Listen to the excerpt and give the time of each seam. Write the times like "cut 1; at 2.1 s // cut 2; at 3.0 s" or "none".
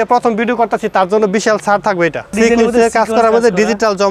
cut 1; at 2.3 s